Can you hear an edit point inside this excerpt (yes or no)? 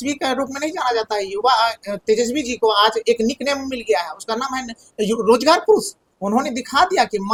no